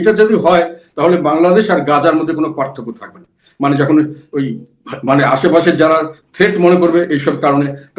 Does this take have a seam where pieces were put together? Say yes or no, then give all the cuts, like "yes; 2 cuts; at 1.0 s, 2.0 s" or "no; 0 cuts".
no; 0 cuts